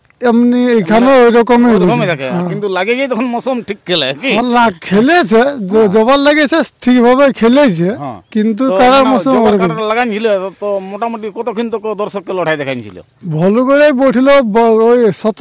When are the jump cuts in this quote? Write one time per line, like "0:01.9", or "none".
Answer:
none